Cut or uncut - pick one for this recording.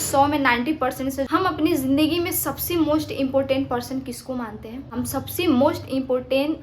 cut